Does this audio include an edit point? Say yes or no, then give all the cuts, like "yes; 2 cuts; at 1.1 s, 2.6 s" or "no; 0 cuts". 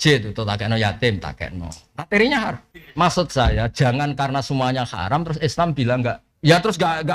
yes; 2 cuts; at 2.6 s, 6.3 s